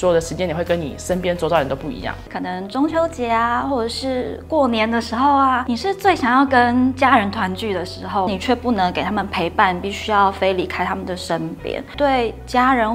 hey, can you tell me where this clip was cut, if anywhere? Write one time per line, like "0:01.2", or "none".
0:02.2
0:05.7
0:08.3
0:11.9